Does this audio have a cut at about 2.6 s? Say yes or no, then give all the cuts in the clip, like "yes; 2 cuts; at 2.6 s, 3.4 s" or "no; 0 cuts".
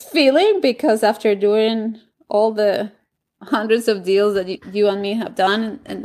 no; 2 cuts; at 4.6 s, 5.3 s